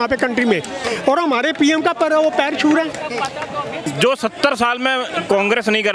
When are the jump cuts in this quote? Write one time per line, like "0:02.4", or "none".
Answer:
0:03.8